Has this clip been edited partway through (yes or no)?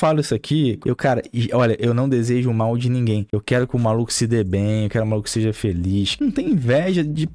yes